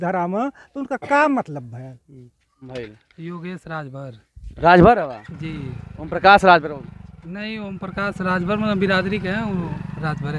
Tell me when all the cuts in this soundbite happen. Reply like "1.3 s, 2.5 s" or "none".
2.7 s